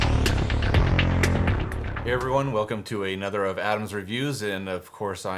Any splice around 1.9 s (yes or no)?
yes